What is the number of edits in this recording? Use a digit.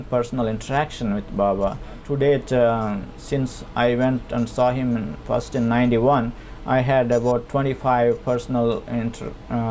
1